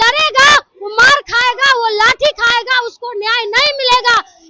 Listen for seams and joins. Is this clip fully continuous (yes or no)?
yes